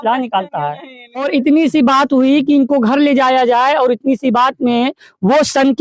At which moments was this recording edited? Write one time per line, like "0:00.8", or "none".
0:01.2